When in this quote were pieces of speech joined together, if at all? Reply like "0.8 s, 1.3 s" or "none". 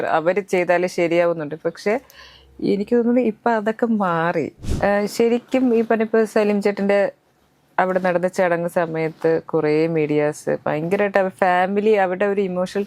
4.6 s